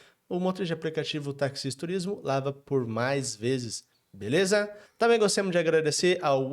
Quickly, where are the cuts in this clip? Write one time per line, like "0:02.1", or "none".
0:04.8